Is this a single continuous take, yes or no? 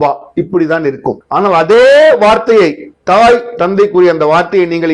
no